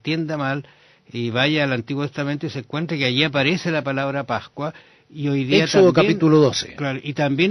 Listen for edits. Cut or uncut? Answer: cut